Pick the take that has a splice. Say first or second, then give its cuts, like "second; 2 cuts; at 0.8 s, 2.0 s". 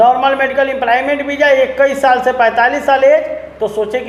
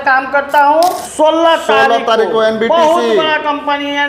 second; 1 cut; at 1.0 s